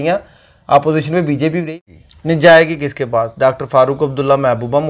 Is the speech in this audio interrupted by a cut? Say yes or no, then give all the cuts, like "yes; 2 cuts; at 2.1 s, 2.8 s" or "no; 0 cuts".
yes; 1 cut; at 1.6 s